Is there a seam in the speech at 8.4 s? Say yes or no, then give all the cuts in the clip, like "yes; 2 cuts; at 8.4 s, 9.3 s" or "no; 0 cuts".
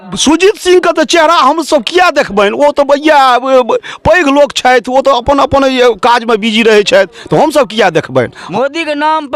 yes; 1 cut; at 8.4 s